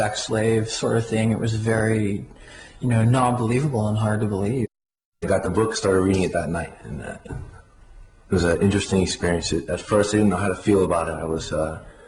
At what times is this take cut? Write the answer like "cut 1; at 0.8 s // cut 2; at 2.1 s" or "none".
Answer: cut 1; at 4.6 s